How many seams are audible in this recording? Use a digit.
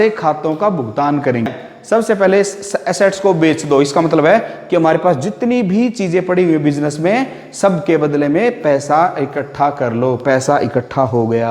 1